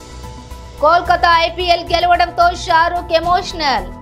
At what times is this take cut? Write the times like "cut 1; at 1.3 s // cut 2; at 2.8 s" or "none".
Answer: none